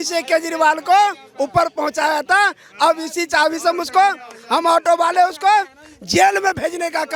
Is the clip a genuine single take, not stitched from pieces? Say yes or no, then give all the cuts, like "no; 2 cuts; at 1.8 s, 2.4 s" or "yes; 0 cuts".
yes; 0 cuts